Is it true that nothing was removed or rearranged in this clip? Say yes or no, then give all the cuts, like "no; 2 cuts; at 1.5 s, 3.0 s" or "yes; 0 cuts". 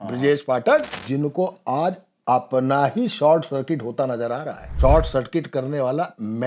no; 2 cuts; at 0.9 s, 4.6 s